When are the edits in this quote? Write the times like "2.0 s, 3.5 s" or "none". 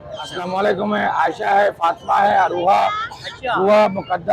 none